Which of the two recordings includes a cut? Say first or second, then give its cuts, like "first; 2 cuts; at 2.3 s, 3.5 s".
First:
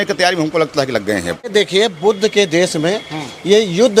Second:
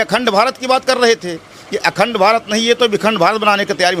first; 1 cut; at 1.5 s